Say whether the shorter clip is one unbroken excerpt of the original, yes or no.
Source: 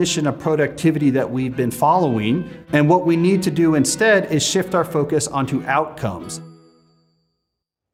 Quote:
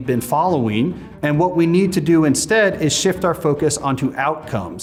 yes